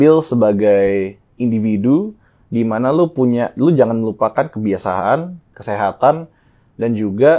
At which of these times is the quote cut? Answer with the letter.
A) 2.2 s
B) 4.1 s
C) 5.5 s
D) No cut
C